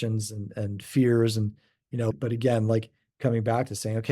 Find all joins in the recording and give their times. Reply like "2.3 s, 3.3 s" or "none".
2.1 s, 3.0 s